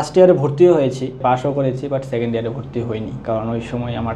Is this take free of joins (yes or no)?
no